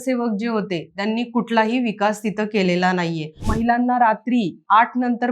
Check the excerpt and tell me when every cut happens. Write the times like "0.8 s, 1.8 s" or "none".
3.5 s